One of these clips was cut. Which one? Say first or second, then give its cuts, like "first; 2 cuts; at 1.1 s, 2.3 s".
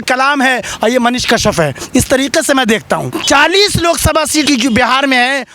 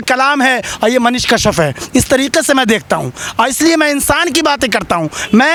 first; 2 cuts; at 3.1 s, 4.5 s